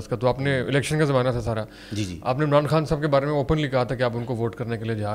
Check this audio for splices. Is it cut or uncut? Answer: uncut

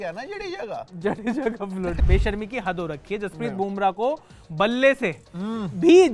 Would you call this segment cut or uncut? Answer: cut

